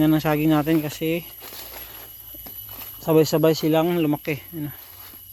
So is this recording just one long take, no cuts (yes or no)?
yes